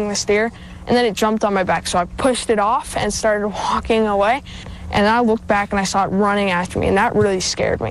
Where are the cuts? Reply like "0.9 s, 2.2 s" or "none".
2.1 s, 7.1 s